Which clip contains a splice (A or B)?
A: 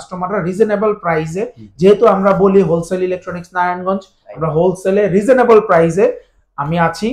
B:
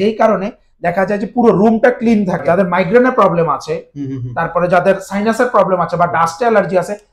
B